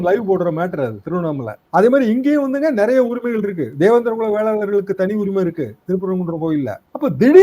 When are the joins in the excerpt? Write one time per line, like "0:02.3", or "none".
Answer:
none